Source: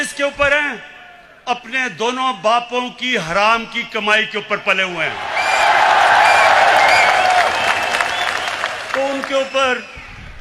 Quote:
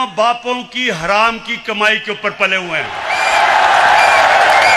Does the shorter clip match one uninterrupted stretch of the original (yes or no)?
yes